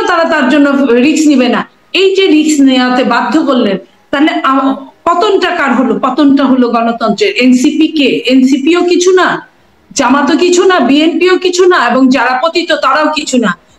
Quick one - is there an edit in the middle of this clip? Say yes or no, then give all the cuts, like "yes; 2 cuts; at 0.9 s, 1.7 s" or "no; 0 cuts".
no; 0 cuts